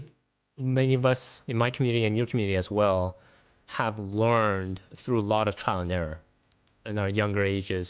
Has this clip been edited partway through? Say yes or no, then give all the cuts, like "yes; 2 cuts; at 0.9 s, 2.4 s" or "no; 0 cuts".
no; 0 cuts